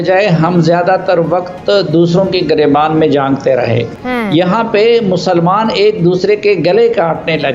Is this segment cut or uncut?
cut